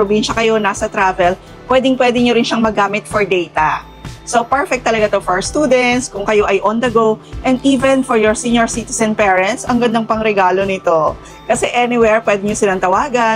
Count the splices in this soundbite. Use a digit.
0